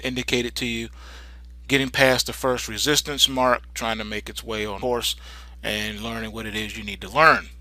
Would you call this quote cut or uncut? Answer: uncut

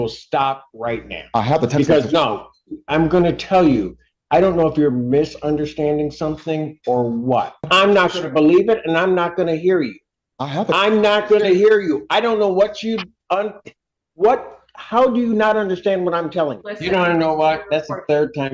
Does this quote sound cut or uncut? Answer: cut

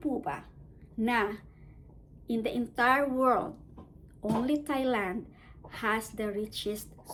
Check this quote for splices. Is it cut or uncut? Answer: uncut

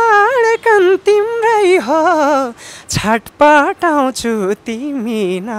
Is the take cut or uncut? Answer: uncut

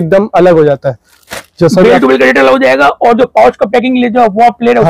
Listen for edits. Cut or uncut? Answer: uncut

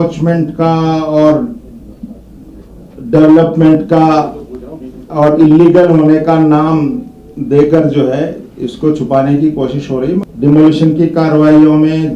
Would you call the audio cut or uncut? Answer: cut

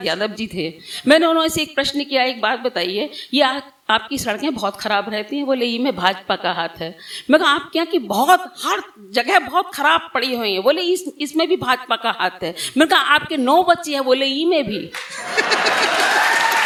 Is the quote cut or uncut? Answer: uncut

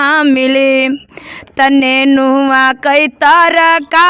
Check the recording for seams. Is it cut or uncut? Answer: uncut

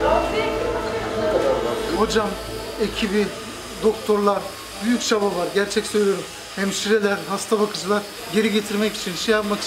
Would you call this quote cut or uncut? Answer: cut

